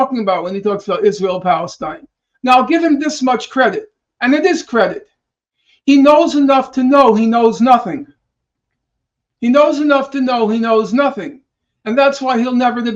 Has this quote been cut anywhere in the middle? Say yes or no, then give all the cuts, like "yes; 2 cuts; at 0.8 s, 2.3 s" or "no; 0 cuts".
no; 0 cuts